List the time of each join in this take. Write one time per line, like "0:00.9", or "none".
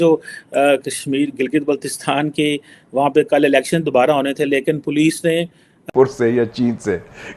0:05.9